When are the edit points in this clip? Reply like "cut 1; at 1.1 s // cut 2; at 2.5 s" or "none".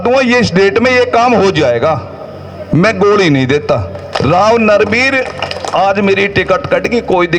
cut 1; at 4.0 s